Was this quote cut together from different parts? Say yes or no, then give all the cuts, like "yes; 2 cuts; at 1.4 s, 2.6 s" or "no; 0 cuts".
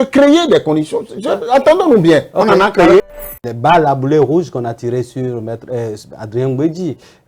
yes; 1 cut; at 3.1 s